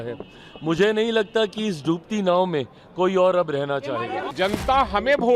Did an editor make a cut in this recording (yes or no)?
yes